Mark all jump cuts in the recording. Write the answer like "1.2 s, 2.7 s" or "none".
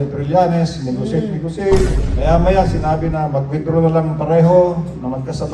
2.0 s